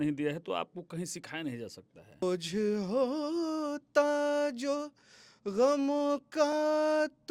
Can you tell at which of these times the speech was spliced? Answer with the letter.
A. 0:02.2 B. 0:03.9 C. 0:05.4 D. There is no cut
A